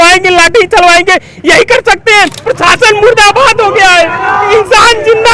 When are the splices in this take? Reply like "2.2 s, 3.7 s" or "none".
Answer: 2.4 s